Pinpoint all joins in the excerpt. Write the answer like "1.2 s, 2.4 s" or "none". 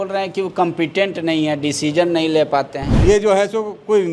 2.9 s